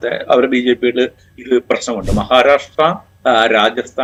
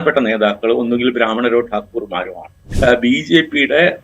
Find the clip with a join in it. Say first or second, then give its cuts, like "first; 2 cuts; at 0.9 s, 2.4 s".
second; 1 cut; at 2.6 s